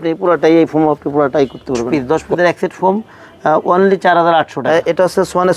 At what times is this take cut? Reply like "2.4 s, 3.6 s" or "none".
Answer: 1.9 s, 4.6 s